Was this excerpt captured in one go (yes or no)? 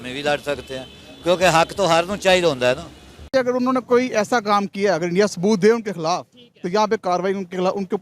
no